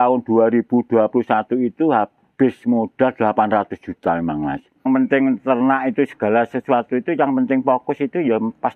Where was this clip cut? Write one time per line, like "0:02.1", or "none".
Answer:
0:04.9

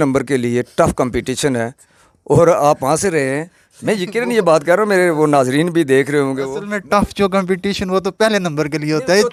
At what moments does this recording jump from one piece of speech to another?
none

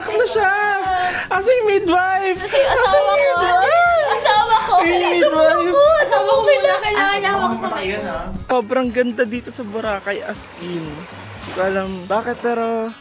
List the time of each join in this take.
0:08.3

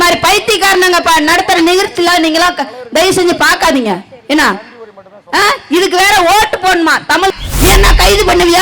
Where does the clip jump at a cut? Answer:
0:07.3

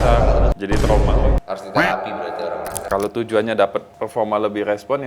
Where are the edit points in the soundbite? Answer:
0:02.8

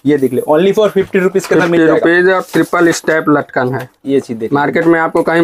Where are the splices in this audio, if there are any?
none

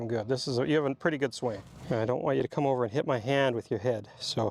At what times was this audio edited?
0:01.7

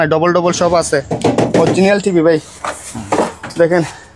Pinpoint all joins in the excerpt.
none

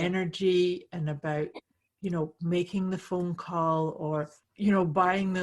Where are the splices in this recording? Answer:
0:04.4

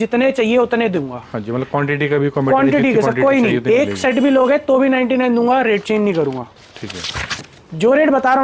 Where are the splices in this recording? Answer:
none

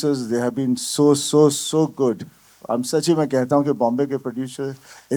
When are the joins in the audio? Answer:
none

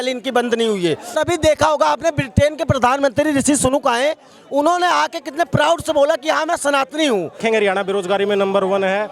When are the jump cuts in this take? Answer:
0:01.2
0:07.4

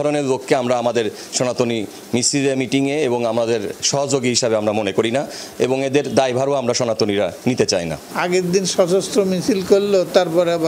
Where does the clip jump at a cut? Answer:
none

